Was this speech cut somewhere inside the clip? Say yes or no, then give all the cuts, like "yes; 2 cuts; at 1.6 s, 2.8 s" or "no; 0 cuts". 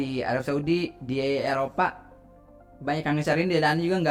no; 0 cuts